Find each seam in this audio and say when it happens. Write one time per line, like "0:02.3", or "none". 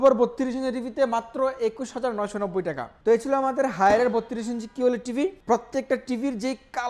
0:02.9
0:05.4